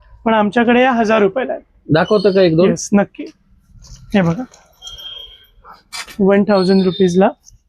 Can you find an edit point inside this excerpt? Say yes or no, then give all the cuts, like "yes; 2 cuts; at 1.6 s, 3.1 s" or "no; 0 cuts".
no; 0 cuts